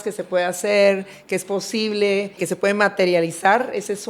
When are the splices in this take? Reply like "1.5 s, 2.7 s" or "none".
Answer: 2.4 s